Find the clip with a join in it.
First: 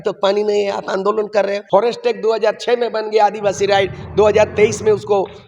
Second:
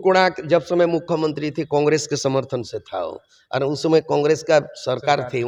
first; 1 cut; at 1.6 s

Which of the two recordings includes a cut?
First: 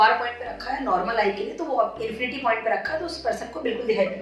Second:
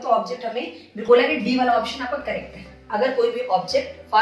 second; 1 cut; at 1.1 s

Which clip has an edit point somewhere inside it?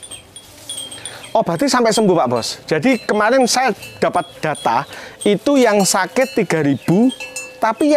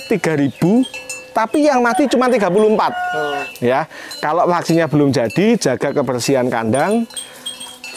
second; 1 cut; at 3.4 s

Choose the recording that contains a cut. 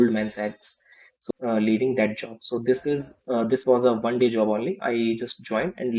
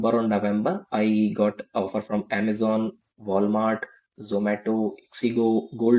first; 1 cut; at 1.2 s

